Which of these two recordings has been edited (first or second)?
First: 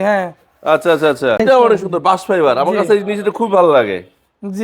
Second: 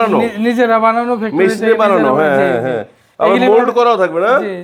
first